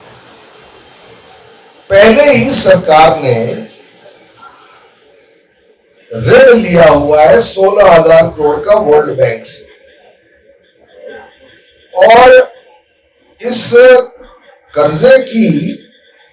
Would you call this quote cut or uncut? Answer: uncut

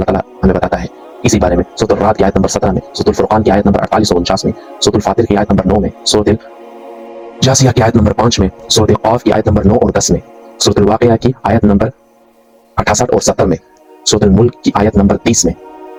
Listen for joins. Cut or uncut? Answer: uncut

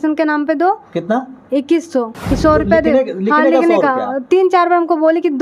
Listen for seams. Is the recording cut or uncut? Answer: cut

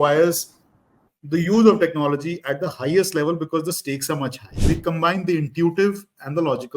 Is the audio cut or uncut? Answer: cut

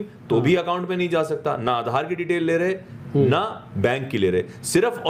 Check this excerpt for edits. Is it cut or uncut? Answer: uncut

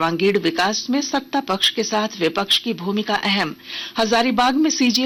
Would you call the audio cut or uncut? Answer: uncut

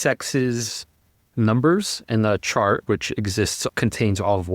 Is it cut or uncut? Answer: cut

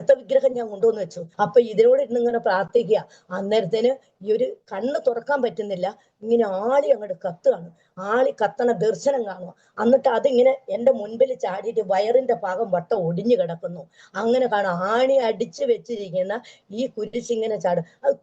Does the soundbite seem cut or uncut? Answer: cut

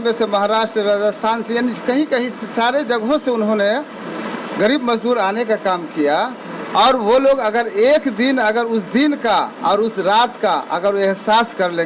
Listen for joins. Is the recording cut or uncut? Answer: uncut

